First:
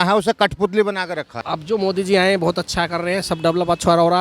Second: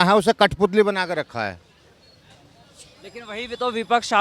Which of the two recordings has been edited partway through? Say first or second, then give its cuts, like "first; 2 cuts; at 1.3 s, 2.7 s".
first; 1 cut; at 1.3 s